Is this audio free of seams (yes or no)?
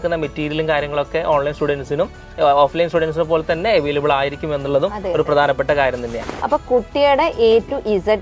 no